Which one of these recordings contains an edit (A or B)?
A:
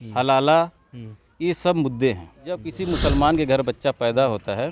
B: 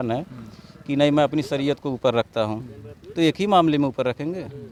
A